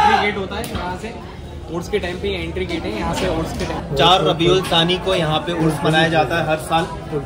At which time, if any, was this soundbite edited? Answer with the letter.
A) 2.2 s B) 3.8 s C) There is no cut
B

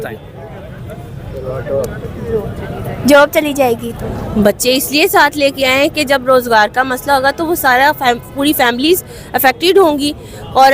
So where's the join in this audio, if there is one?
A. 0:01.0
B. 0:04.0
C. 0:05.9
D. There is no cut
B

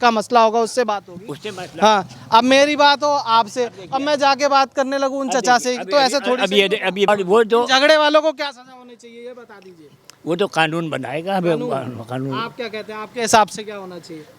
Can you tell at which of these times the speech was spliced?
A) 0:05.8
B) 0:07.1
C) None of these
B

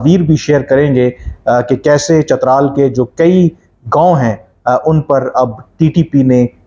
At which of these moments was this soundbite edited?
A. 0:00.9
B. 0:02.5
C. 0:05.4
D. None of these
D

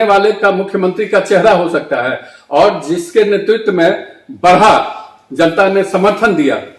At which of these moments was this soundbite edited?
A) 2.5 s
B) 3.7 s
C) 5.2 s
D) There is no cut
D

